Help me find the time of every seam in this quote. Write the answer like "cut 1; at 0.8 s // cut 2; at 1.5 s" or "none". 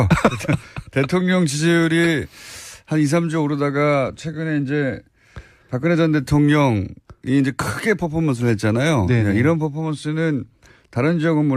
cut 1; at 8.3 s

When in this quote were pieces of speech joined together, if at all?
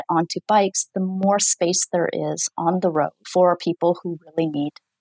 cut 1; at 3.2 s

